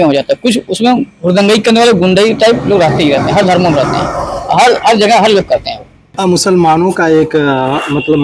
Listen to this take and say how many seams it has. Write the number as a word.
one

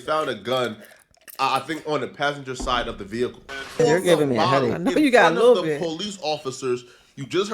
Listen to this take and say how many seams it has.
one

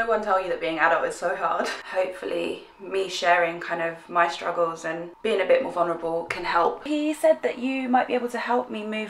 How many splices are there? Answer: two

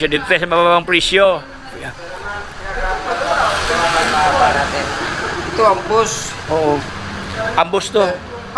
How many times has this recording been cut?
zero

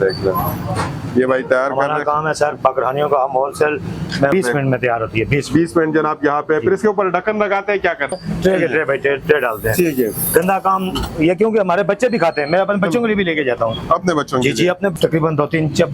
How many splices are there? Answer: three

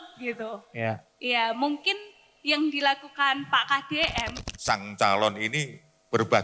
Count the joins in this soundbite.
one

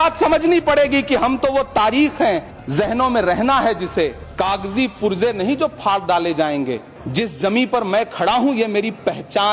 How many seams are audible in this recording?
three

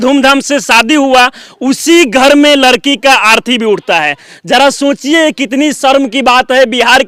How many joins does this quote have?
zero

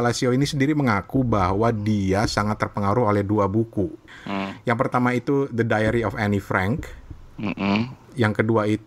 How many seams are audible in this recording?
one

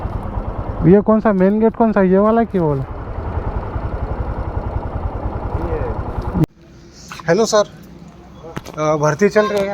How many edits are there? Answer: one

